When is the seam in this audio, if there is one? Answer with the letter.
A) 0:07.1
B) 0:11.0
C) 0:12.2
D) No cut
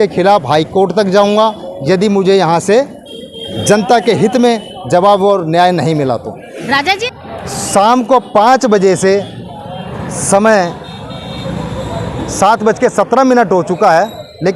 A